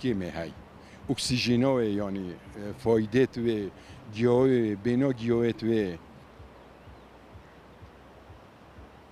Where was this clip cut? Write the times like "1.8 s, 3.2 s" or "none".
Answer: none